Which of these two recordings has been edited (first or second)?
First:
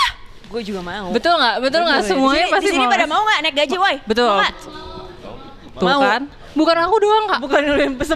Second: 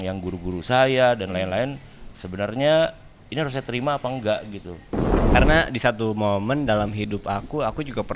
second